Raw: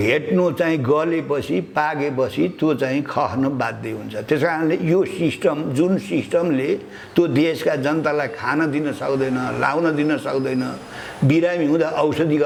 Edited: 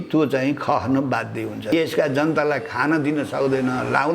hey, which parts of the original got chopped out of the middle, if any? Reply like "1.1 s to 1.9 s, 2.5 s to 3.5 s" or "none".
4.2 s to 7.4 s